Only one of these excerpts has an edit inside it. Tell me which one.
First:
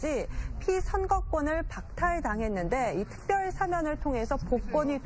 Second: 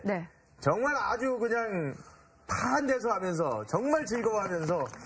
second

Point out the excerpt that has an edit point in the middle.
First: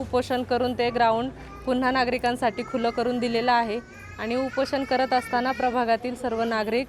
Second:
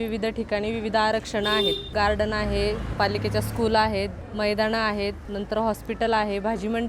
second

